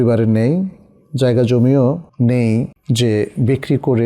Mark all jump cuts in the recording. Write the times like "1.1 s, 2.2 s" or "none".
2.1 s, 2.8 s